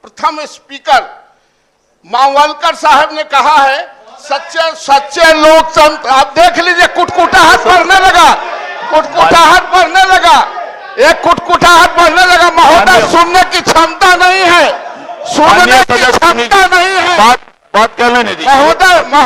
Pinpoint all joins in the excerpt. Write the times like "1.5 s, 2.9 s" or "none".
none